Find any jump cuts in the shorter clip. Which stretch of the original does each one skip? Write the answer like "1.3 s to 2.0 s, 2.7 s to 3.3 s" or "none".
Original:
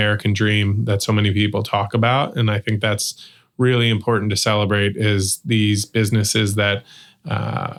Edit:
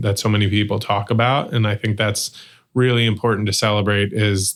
none